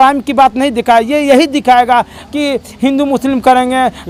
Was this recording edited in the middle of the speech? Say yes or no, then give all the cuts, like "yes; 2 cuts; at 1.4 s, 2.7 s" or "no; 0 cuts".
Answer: no; 0 cuts